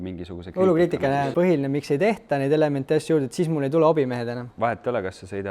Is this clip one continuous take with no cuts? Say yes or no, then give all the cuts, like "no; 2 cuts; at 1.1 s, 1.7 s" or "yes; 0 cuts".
no; 2 cuts; at 1.3 s, 4.5 s